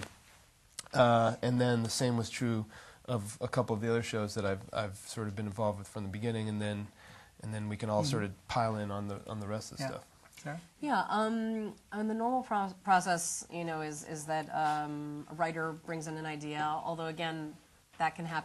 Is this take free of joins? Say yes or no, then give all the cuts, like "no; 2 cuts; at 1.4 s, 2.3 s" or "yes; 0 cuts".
no; 1 cut; at 14.5 s